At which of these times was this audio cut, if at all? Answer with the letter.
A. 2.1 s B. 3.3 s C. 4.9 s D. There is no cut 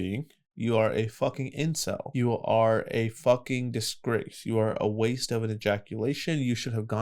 A